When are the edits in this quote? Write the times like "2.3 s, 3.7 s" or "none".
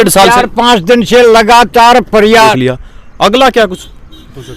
2.5 s